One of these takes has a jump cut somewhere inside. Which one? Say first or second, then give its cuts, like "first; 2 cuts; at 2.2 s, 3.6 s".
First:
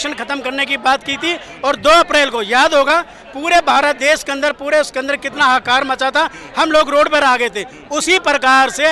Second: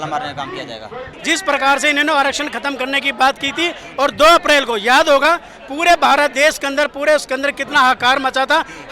second; 1 cut; at 1.1 s